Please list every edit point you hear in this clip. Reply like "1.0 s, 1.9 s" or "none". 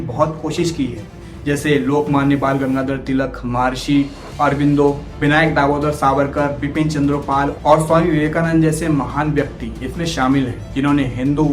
none